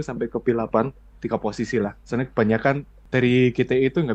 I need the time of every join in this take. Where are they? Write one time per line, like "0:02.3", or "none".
0:01.1
0:02.9